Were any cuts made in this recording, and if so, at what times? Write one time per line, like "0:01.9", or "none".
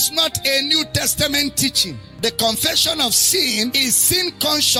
none

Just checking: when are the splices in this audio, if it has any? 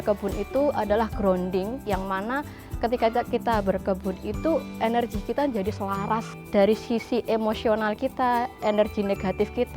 0:01.8
0:06.3

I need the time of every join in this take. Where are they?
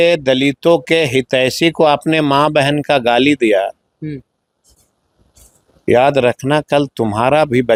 none

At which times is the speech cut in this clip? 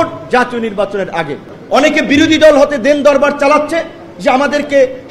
0:01.5

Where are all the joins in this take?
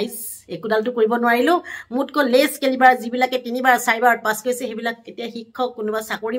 none

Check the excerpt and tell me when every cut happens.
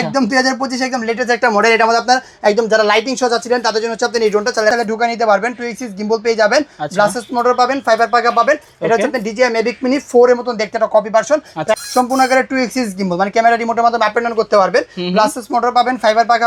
0:04.7
0:11.7

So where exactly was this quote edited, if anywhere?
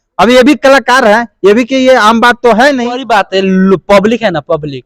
0:03.0

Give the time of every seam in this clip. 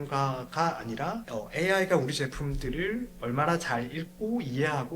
0:01.2

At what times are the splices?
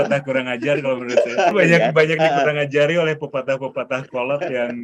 0:01.5

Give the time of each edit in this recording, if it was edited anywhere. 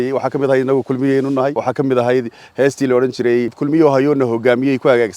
0:01.6
0:03.6

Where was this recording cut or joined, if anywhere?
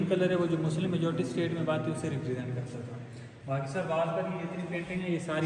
none

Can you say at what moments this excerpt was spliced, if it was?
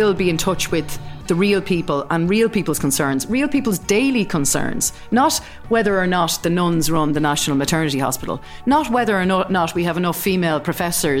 none

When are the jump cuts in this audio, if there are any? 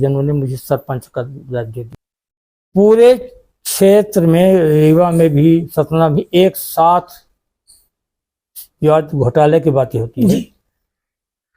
0:02.0

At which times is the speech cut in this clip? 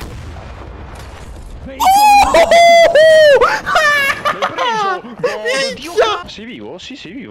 0:06.2

